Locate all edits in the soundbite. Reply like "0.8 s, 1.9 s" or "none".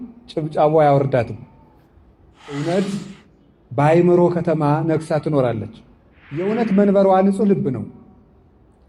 2.6 s, 6.5 s